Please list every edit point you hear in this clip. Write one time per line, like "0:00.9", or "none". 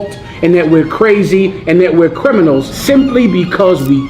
0:02.7

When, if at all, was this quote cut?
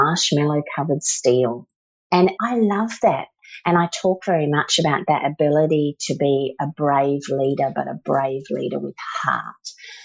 0:02.2
0:03.4

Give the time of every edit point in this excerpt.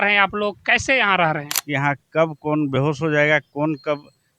0:01.5

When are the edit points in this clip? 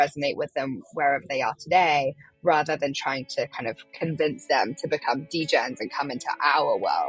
0:03.9

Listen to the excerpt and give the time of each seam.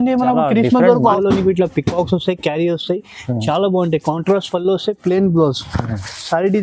0:01.2

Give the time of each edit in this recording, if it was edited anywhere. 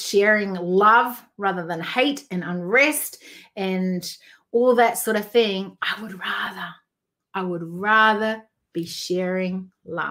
none

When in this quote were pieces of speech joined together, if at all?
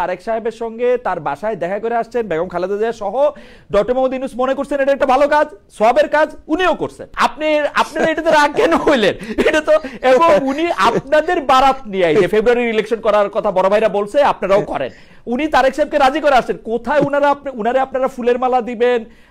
none

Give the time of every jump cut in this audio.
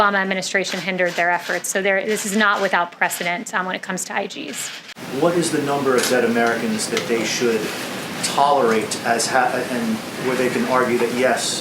0:04.9

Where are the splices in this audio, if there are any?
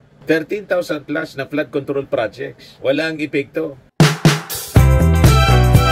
0:03.8

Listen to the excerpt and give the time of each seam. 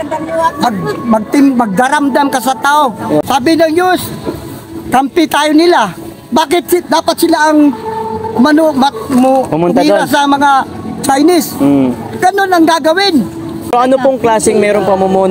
0:03.2
0:13.7

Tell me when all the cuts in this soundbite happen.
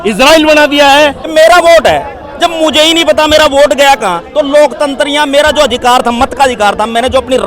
0:01.2

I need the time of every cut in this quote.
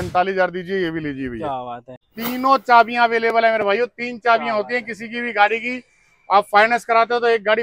0:02.1

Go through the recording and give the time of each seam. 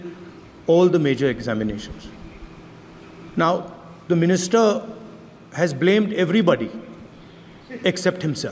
none

